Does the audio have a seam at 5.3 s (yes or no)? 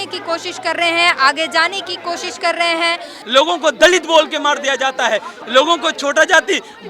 yes